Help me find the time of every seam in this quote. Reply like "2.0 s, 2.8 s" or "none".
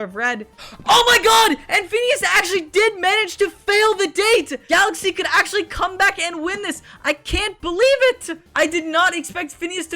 none

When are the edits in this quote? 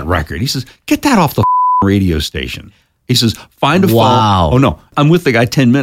4.9 s

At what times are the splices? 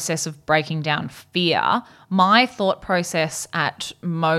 none

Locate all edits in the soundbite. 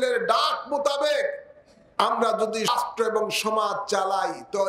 2.7 s

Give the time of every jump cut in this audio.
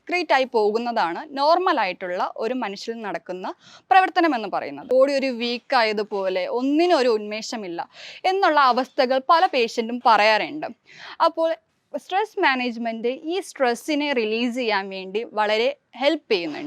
4.8 s

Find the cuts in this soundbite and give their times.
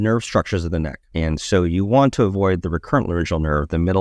1.0 s

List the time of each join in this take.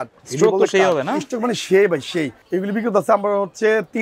2.4 s

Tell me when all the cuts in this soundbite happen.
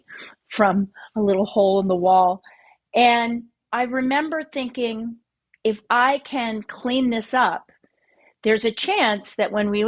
3.6 s

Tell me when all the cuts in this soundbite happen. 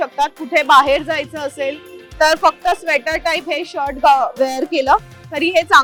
none

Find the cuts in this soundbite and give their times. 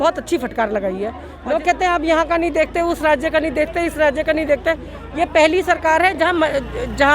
1.3 s

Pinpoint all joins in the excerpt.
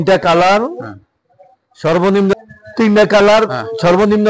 2.3 s

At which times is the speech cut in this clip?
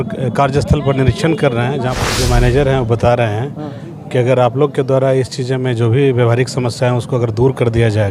2.0 s

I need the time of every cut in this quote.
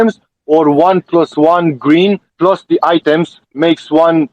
none

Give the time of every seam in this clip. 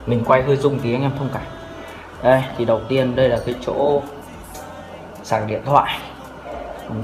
5.7 s

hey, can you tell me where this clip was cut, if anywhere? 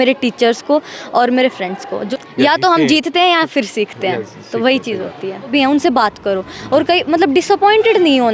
2.0 s, 5.5 s

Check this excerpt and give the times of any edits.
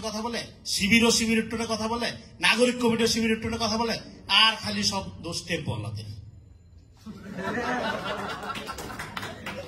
none

